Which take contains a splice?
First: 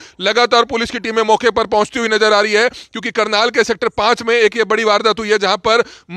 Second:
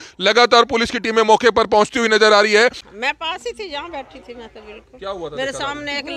second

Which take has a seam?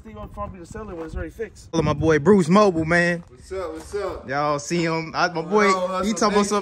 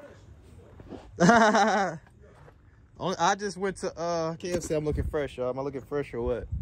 first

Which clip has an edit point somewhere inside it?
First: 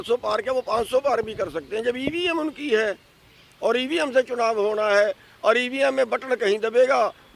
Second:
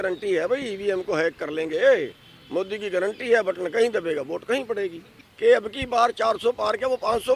second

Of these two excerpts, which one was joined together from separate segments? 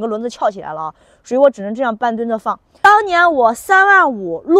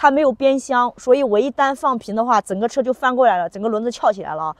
first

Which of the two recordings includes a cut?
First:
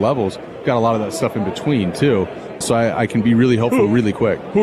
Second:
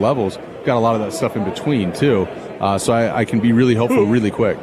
first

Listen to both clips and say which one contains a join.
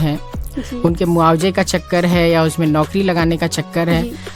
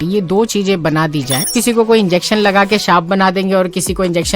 second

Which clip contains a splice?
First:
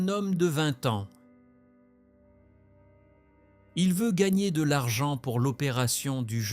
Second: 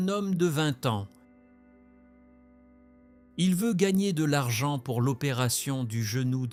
first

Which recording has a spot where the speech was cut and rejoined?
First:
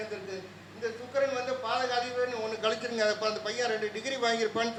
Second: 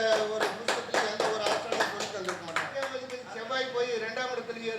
second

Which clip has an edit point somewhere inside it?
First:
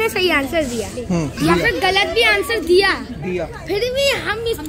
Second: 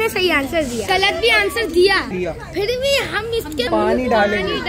second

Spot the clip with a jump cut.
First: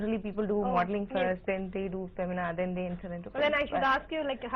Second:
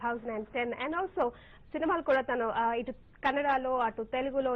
first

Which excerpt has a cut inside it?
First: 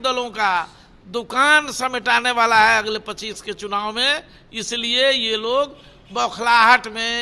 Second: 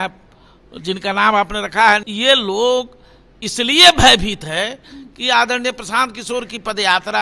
second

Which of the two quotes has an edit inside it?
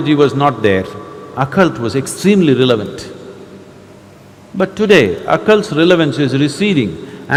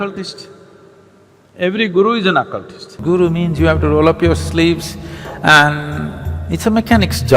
second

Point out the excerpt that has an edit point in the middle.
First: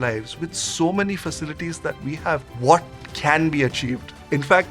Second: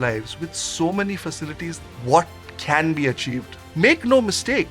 second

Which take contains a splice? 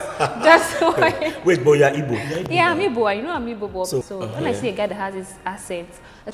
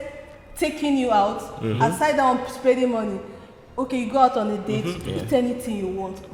first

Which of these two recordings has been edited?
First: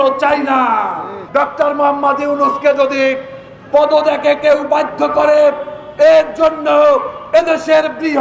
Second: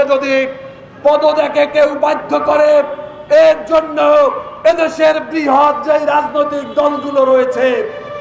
first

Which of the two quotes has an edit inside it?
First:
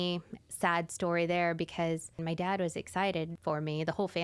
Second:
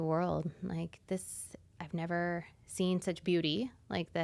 first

